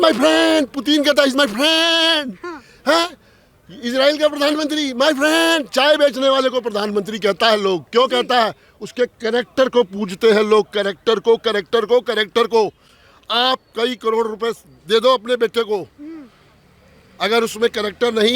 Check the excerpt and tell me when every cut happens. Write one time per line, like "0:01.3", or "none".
none